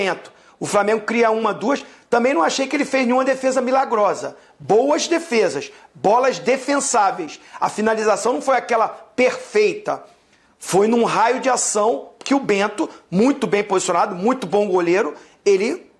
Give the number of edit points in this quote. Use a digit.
0